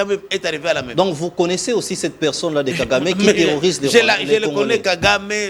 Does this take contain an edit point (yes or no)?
no